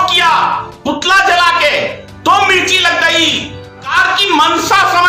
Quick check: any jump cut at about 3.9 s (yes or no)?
yes